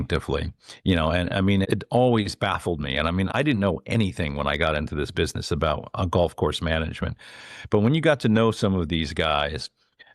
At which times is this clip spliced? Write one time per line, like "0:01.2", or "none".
0:01.6
0:03.3